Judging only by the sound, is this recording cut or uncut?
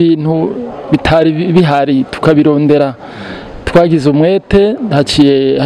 uncut